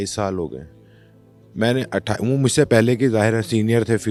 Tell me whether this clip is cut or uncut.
uncut